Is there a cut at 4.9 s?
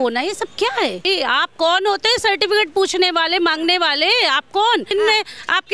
yes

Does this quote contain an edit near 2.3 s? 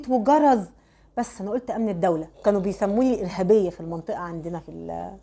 yes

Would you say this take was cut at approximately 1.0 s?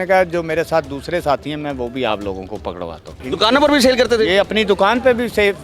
no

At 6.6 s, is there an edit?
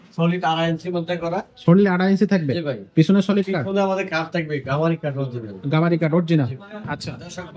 no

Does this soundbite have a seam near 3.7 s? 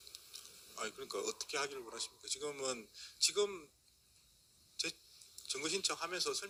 no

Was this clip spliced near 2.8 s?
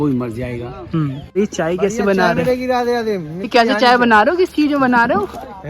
no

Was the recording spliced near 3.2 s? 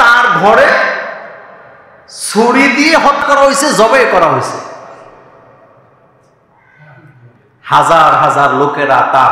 yes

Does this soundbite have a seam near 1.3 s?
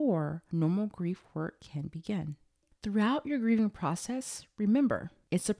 no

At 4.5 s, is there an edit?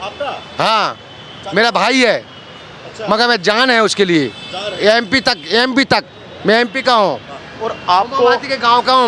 no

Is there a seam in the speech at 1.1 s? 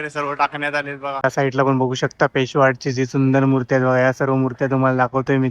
yes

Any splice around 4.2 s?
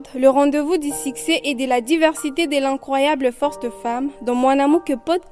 no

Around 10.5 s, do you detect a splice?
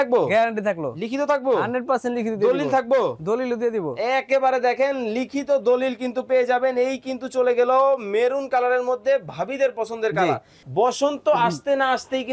yes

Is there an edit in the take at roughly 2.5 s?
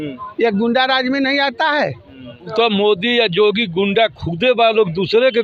yes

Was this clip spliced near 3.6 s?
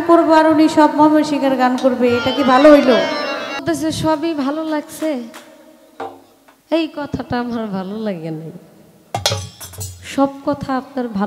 yes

